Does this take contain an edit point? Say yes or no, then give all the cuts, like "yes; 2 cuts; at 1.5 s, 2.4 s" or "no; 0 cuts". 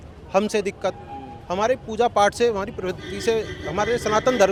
no; 0 cuts